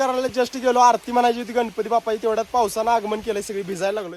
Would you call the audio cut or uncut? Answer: uncut